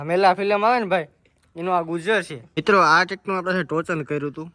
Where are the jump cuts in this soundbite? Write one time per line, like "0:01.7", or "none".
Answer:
0:02.5